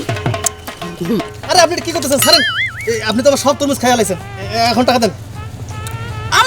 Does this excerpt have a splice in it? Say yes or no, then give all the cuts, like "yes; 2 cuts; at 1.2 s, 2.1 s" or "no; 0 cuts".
no; 0 cuts